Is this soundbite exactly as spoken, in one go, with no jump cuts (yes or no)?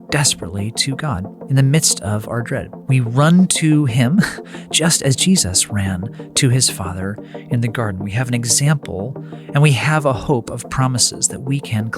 no